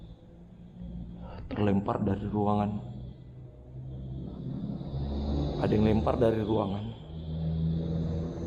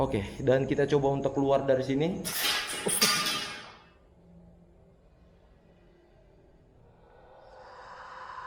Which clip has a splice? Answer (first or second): second